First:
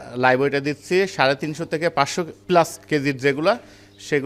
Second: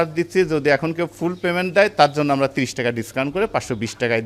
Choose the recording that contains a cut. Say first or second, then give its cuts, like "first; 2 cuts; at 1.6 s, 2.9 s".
first; 1 cut; at 2.8 s